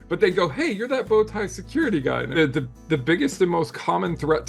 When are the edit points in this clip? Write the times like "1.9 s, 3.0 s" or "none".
2.4 s